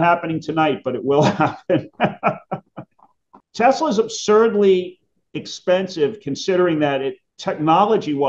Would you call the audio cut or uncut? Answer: cut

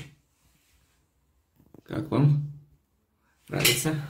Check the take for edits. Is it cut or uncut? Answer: uncut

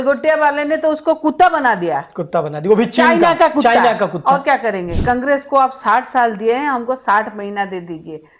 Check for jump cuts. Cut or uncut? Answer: cut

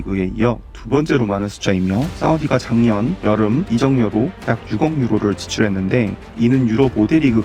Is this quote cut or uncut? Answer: cut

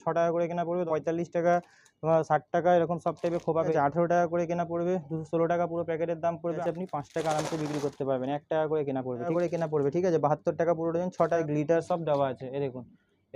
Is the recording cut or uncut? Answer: cut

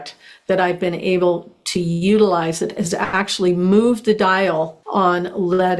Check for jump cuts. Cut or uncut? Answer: cut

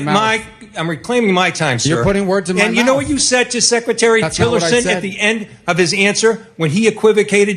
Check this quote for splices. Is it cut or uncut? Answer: uncut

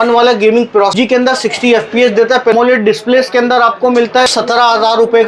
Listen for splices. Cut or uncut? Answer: cut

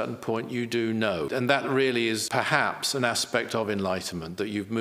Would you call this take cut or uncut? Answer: cut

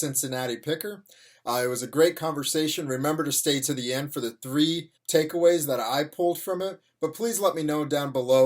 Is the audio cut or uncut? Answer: cut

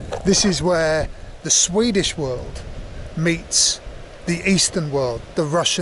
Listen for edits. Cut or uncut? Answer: uncut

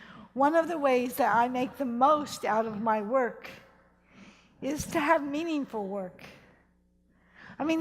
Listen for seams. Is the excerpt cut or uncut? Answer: cut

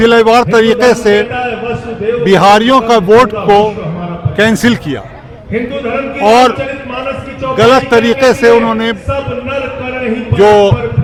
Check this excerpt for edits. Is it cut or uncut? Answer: uncut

